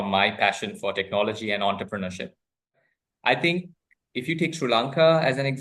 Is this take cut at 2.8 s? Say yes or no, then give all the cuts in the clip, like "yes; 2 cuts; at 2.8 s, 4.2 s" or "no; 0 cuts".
yes; 1 cut; at 2.8 s